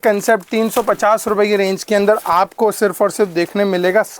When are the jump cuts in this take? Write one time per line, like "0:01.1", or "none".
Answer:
none